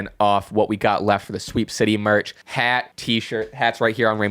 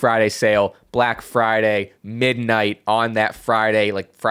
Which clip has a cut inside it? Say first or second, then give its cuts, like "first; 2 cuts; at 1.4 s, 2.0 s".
first; 1 cut; at 2.7 s